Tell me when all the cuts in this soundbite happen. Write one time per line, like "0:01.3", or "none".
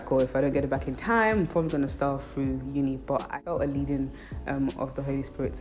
0:03.4